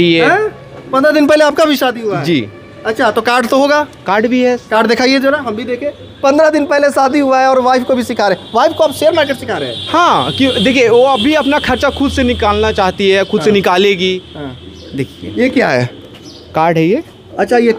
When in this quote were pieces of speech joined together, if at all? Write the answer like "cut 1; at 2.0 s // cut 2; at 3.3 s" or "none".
none